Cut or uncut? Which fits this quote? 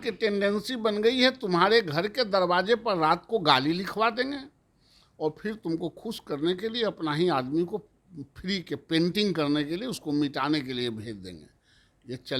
uncut